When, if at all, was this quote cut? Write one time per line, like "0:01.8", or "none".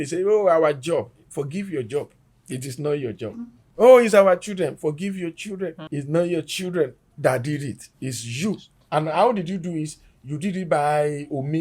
none